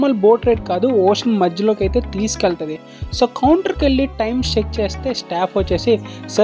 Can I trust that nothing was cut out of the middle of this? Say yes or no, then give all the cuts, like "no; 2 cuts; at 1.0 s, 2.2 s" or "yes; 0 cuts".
yes; 0 cuts